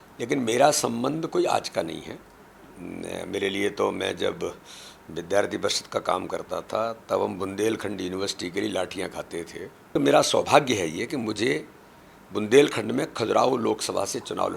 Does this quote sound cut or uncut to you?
cut